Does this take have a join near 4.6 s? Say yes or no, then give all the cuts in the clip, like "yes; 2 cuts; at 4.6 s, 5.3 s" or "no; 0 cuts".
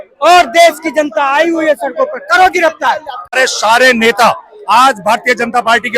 no; 1 cut; at 3.4 s